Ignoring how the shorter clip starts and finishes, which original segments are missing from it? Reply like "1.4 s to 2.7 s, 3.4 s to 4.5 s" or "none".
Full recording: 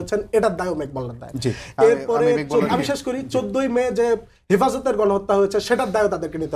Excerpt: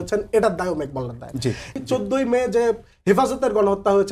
1.7 s to 3.2 s